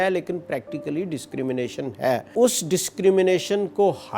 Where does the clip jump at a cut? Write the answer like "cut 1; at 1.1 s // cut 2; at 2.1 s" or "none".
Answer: cut 1; at 2.3 s

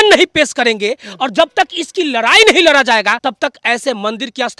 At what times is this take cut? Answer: cut 1; at 3.2 s

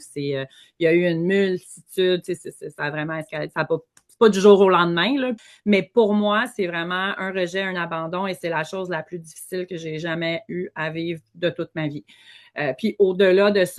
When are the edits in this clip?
cut 1; at 5.5 s

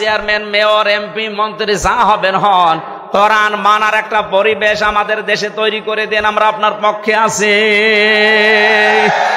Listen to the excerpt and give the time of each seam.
none

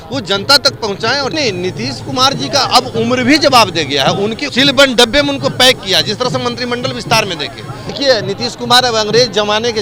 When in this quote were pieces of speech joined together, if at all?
cut 1; at 1.3 s // cut 2; at 4.4 s // cut 3; at 7.9 s

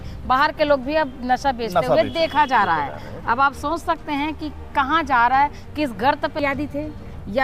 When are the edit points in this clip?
cut 1; at 6.4 s

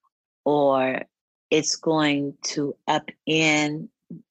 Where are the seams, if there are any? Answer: none

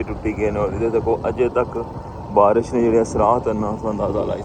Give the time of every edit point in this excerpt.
none

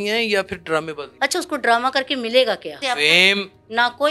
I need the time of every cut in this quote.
cut 1; at 1.0 s // cut 2; at 2.8 s

